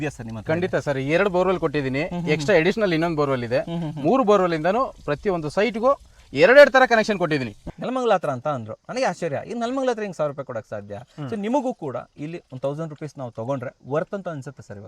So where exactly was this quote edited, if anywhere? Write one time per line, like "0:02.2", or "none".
0:07.6

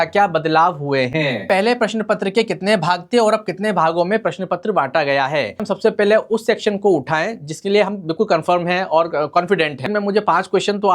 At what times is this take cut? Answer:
0:01.5
0:05.7
0:09.9

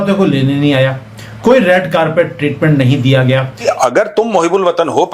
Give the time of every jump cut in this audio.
0:03.8

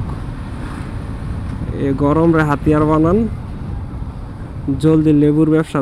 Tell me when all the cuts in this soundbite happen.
none

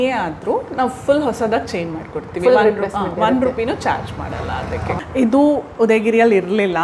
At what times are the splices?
0:05.0

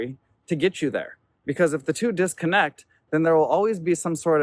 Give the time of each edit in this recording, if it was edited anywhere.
none

